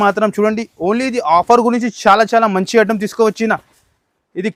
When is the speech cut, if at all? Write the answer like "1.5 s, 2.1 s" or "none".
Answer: none